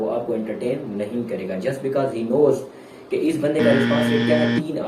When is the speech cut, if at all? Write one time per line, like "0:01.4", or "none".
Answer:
none